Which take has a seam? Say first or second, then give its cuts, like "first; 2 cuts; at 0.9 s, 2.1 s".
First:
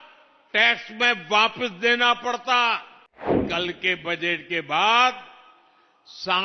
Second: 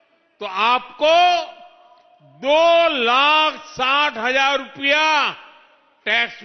first; 1 cut; at 3.3 s